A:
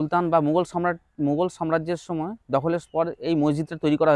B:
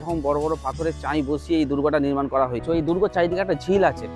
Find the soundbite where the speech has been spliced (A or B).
B